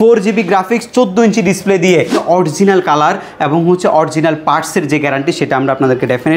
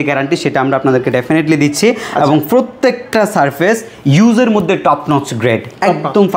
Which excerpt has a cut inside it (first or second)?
first